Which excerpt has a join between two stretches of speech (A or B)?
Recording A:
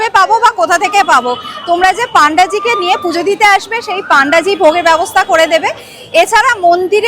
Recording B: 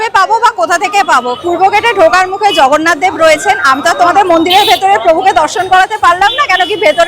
B